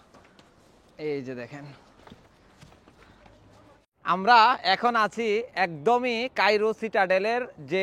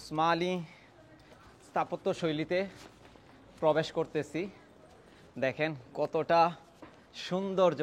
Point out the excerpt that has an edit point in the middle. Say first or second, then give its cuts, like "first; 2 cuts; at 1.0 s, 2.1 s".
first; 1 cut; at 3.8 s